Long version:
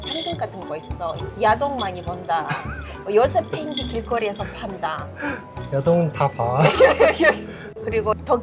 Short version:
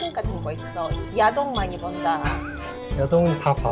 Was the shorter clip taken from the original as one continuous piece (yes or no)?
no